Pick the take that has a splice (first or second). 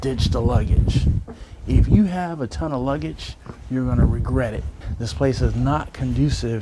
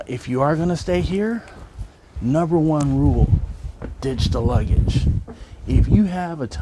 first